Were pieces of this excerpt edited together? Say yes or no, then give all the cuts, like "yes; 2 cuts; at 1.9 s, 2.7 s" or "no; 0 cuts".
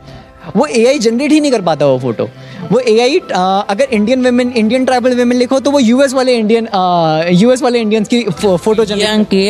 no; 0 cuts